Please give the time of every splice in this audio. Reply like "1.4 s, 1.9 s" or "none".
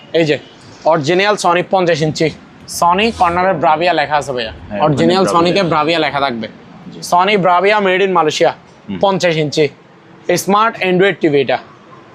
none

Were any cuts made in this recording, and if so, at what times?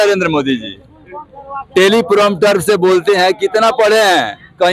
none

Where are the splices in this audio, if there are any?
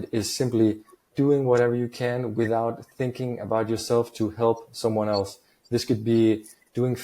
1.0 s

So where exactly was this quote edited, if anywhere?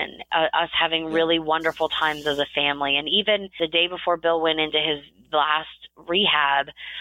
3.5 s

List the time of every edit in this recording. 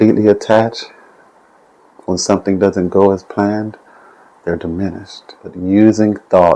5.6 s

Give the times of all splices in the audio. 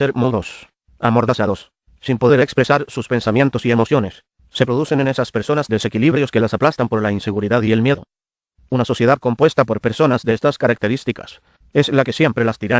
3.5 s

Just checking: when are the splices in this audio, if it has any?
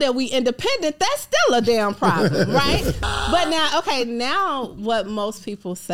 3.0 s

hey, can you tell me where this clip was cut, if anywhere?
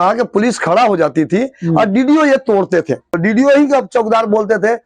3.2 s

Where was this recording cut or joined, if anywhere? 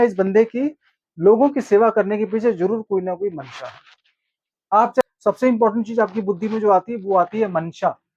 5.0 s

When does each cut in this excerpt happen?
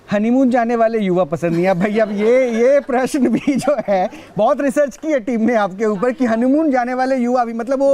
4.9 s

